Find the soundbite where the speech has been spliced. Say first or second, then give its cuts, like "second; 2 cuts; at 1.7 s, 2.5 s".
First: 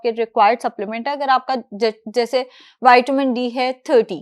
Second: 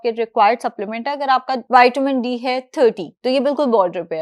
second; 1 cut; at 1.6 s